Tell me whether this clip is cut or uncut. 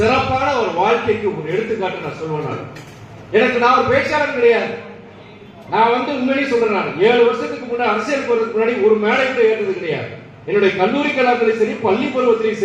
uncut